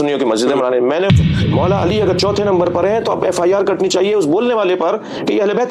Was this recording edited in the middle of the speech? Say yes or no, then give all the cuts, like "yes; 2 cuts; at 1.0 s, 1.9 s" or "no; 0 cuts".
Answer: yes; 1 cut; at 1.1 s